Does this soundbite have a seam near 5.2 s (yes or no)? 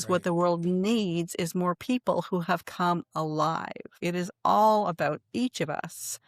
no